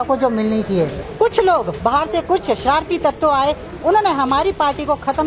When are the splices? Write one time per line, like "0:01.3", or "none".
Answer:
0:01.0